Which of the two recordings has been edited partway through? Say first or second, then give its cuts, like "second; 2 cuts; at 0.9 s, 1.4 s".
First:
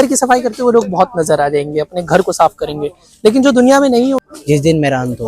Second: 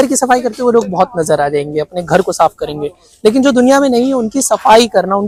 first; 1 cut; at 4.2 s